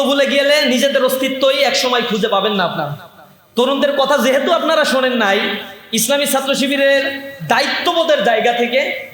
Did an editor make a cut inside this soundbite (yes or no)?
no